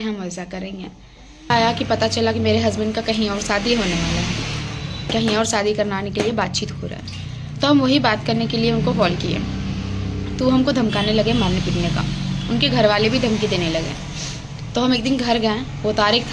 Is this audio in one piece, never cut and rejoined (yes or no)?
no